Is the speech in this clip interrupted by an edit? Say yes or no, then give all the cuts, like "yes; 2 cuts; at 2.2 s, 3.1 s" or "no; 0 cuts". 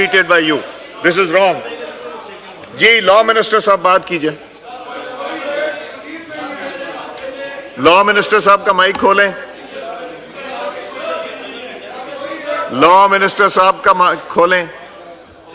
no; 0 cuts